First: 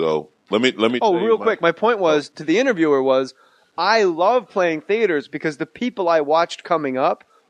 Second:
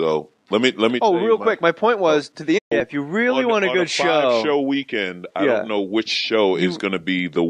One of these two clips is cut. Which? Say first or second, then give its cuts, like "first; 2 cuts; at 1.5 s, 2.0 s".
first; 1 cut; at 2.6 s